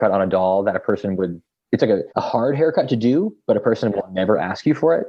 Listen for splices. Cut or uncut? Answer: cut